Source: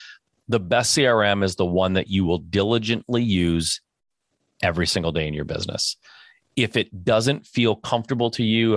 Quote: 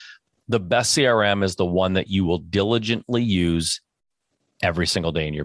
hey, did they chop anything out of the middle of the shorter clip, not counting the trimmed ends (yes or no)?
no